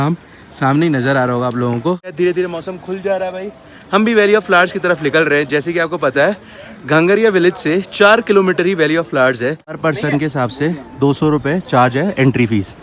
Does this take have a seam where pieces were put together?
yes; 2 cuts; at 2.1 s, 9.8 s

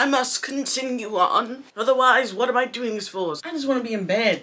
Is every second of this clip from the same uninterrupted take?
no; 1 cut; at 3.4 s

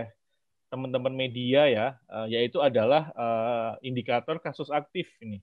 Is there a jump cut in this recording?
no; 0 cuts

